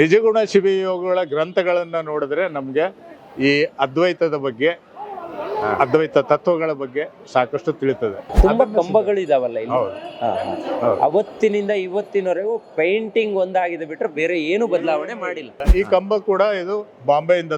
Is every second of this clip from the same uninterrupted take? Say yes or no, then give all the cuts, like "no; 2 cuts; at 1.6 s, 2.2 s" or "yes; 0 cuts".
no; 2 cuts; at 8.3 s, 15.6 s